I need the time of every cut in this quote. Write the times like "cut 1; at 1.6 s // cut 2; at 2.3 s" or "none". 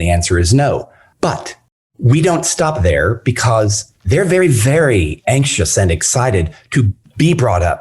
cut 1; at 1.0 s